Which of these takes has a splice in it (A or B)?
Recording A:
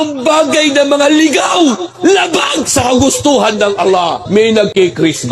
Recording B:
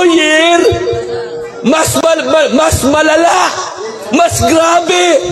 A